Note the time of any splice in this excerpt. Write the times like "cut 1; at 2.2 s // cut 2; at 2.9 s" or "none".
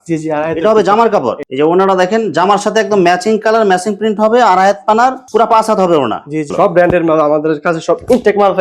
cut 1; at 1.4 s // cut 2; at 6.5 s